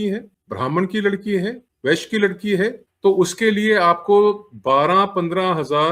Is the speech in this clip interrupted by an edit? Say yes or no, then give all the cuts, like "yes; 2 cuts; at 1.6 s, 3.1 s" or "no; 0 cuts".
yes; 1 cut; at 2.9 s